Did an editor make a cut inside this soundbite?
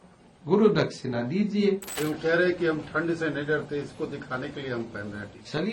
yes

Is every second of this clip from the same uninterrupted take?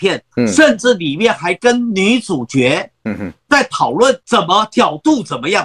yes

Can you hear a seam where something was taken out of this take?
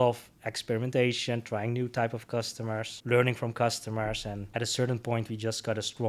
yes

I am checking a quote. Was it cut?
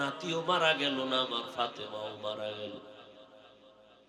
no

